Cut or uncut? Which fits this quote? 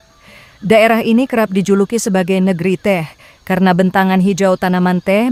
uncut